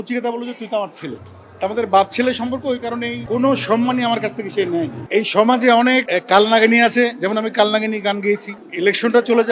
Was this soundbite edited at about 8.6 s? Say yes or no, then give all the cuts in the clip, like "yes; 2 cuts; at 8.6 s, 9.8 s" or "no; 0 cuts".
yes; 4 cuts; at 3.2 s, 5.0 s, 6.1 s, 8.6 s